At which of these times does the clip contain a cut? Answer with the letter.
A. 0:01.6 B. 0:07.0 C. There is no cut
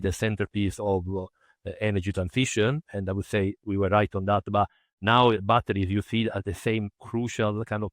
B